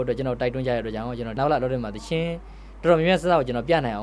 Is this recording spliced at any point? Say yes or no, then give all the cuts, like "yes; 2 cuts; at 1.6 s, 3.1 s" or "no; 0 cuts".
yes; 1 cut; at 1.4 s